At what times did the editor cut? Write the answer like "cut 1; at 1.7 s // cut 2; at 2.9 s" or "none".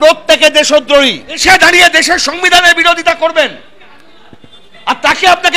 cut 1; at 1.4 s